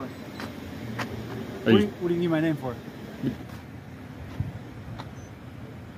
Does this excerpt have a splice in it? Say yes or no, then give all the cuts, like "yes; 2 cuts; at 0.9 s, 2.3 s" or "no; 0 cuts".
yes; 1 cut; at 3.4 s